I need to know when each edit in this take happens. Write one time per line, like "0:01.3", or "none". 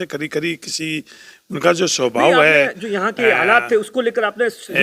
none